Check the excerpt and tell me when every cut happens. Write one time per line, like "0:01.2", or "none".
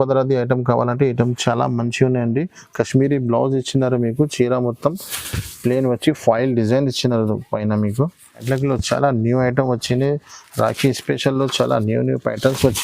0:08.4